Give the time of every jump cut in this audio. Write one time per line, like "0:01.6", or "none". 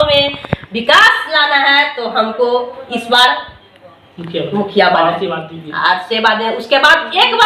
none